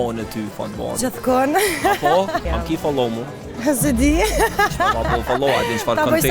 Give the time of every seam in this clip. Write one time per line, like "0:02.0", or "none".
0:02.5